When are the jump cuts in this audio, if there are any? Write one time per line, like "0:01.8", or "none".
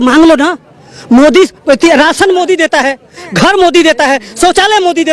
none